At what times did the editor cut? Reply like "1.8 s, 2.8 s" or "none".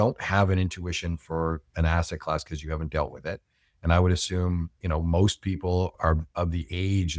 5.9 s